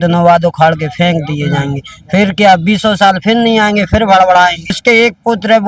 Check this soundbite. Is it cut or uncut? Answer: cut